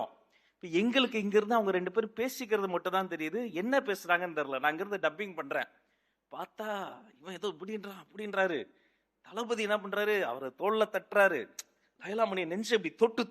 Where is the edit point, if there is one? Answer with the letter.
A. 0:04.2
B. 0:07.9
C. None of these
C